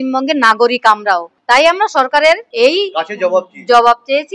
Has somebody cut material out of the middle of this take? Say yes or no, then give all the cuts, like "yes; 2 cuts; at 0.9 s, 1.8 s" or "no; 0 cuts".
yes; 2 cuts; at 1.3 s, 2.5 s